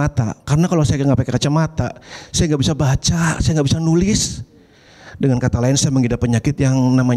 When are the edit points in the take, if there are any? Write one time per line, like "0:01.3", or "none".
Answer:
none